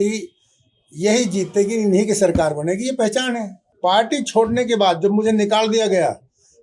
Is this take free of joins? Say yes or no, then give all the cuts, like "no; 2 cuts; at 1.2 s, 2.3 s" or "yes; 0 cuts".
no; 1 cut; at 3.6 s